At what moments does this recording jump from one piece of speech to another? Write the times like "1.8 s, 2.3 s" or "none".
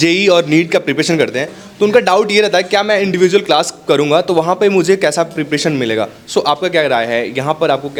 none